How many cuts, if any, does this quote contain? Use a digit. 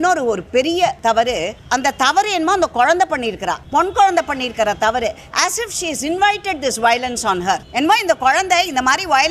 3